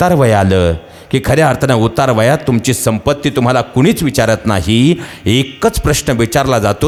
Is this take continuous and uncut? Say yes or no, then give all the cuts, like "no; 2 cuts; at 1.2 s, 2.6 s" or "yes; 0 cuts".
yes; 0 cuts